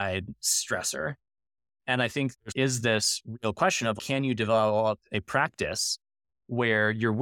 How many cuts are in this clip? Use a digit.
2